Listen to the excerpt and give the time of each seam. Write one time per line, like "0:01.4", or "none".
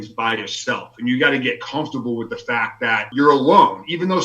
0:03.1

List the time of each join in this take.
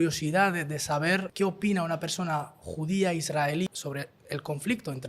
0:01.3
0:03.7

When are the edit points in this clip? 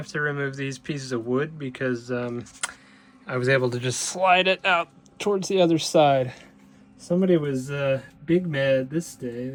none

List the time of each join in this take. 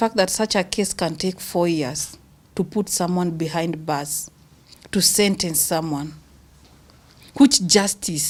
none

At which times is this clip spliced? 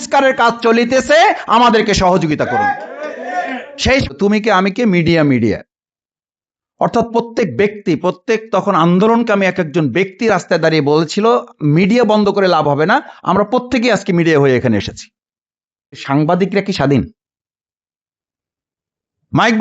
0:04.1
0:16.0

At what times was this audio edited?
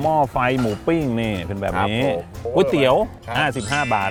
none

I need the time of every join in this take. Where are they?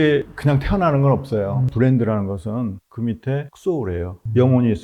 0:01.6

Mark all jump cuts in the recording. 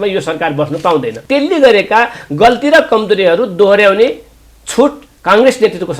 0:01.2
0:05.1

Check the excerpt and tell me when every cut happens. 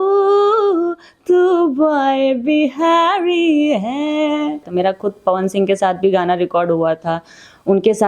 0:04.6

